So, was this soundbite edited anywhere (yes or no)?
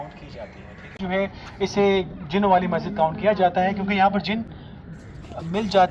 no